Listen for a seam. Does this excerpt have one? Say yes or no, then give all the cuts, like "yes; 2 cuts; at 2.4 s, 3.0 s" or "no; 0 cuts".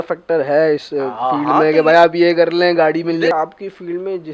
yes; 1 cut; at 3.3 s